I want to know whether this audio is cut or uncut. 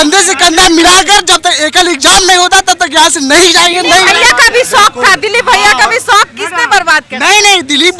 uncut